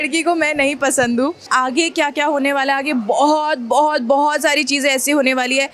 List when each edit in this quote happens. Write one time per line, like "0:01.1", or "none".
0:01.4